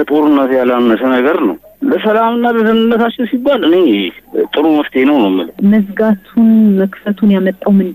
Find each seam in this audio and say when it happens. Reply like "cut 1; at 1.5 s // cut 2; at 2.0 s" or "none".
cut 1; at 5.6 s